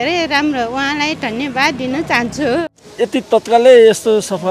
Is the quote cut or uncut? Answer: cut